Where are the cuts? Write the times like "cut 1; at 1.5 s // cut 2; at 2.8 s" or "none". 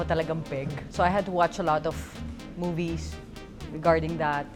none

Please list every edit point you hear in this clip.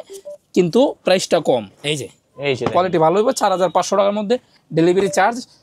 none

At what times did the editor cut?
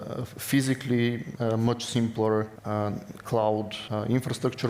cut 1; at 1.3 s // cut 2; at 2.6 s // cut 3; at 3.8 s

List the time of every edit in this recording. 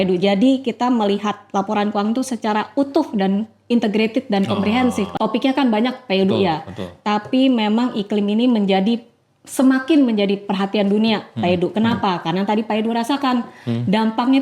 cut 1; at 5.1 s

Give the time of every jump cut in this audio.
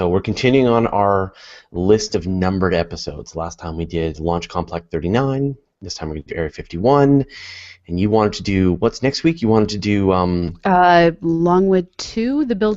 none

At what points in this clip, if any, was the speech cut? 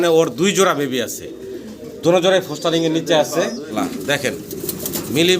cut 1; at 3.6 s

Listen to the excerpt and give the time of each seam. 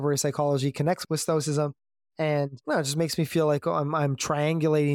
cut 1; at 1.0 s

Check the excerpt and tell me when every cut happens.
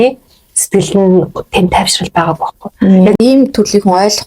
cut 1; at 3.2 s

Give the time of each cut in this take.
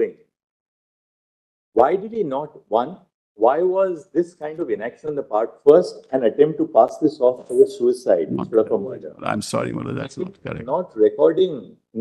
none

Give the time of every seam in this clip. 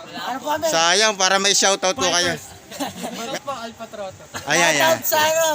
cut 1; at 3.2 s

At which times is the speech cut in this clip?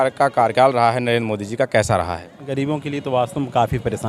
cut 1; at 2.5 s

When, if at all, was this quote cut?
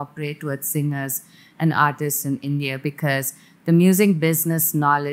none

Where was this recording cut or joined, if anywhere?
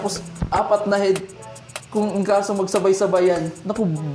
none

